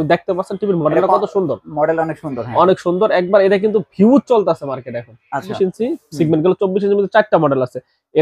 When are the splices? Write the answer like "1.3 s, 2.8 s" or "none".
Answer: 5.5 s